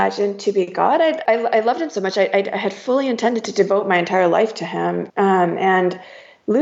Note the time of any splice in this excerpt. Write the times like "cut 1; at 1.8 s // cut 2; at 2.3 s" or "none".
cut 1; at 1.2 s